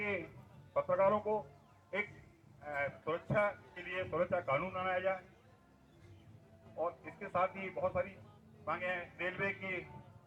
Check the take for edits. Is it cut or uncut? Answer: uncut